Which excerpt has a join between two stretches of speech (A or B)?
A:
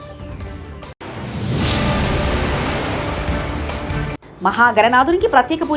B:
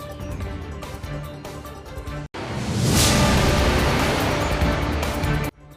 B